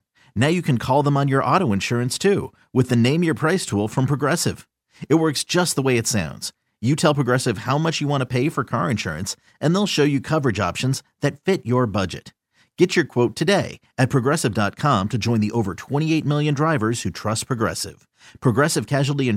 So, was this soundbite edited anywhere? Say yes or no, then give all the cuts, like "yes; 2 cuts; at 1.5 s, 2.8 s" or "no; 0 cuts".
no; 0 cuts